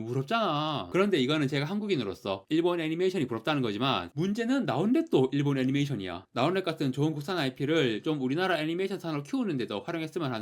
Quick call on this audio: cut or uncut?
cut